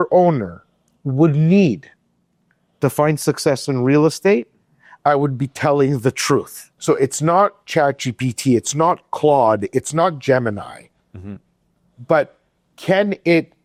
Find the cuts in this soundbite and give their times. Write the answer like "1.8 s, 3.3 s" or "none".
none